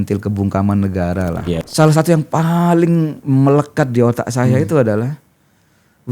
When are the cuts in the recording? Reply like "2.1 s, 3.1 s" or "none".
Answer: 1.6 s